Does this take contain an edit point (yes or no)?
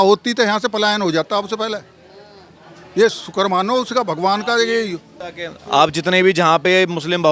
no